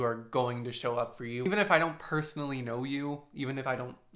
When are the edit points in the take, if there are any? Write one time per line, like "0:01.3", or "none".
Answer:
0:01.5